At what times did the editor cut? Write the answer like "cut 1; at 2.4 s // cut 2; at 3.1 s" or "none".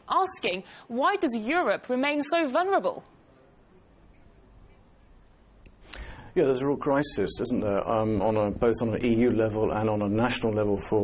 cut 1; at 1.5 s

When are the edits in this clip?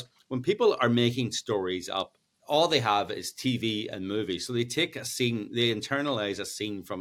cut 1; at 2.3 s

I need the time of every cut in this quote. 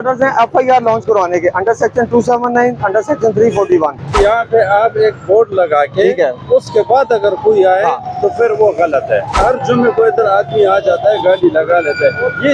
cut 1; at 4.2 s // cut 2; at 9.4 s

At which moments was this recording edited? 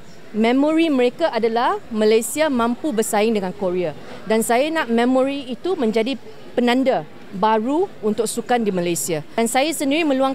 cut 1; at 9.3 s

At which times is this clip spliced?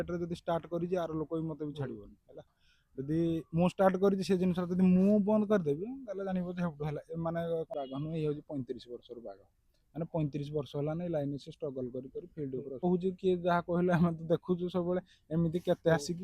cut 1; at 7.7 s // cut 2; at 12.8 s

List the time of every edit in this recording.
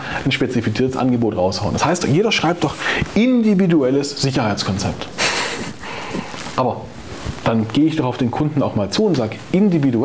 none

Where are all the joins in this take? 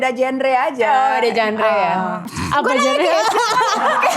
cut 1; at 2.3 s

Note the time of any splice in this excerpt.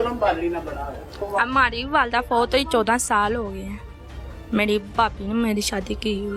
cut 1; at 1.1 s

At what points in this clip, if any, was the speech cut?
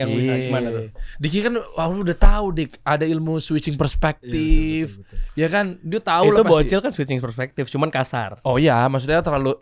none

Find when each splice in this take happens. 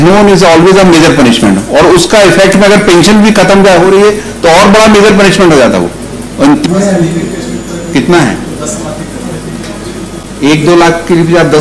cut 1; at 6.7 s

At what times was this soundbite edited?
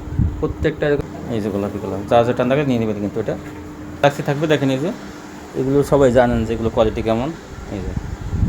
cut 1; at 1.0 s // cut 2; at 4.0 s

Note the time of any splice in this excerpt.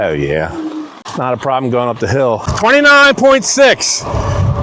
cut 1; at 1.0 s // cut 2; at 2.5 s

